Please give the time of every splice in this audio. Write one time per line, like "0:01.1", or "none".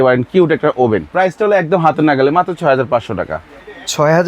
0:01.1